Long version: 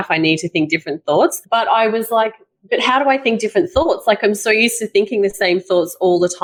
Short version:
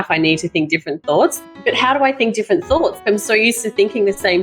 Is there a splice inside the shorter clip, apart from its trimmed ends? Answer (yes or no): yes